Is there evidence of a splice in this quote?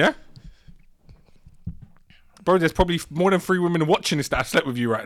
no; 0 cuts

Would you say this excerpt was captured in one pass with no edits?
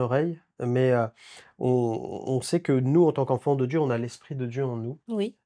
yes; 0 cuts

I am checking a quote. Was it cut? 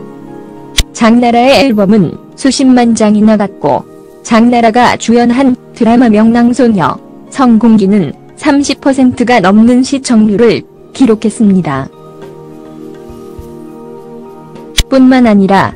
no; 0 cuts

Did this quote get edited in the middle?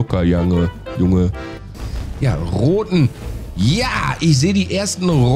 yes; 1 cut; at 1.8 s

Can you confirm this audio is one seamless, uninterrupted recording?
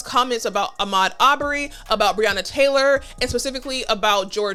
yes; 0 cuts

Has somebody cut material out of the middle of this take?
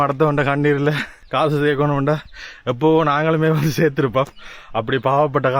yes; 1 cut; at 1.1 s

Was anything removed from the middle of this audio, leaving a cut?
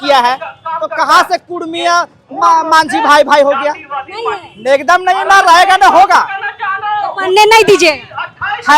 no; 0 cuts

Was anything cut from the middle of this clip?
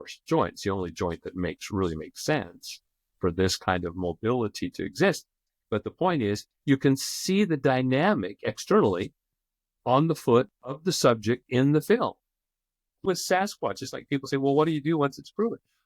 yes; 1 cut; at 12.9 s

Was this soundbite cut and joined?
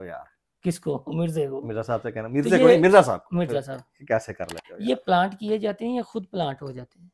no; 0 cuts

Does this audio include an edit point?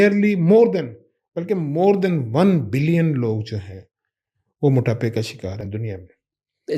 no; 0 cuts

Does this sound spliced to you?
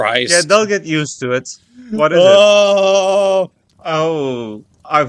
yes; 1 cut; at 3.7 s

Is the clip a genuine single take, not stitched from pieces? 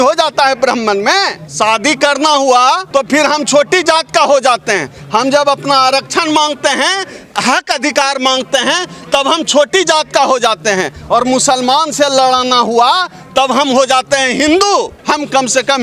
no; 3 cuts; at 1.4 s, 2.8 s, 14.9 s

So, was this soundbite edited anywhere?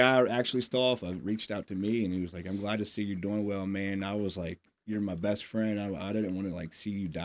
no; 0 cuts

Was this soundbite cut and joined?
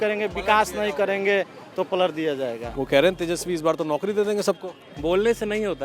yes; 1 cut; at 2.6 s

